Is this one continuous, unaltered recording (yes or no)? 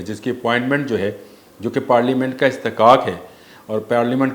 yes